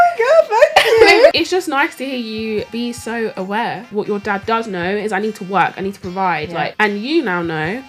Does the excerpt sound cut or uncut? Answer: cut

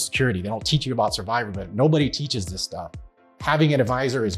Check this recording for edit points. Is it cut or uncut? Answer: cut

